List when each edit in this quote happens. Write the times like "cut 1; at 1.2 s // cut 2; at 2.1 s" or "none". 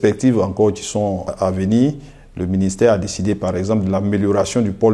none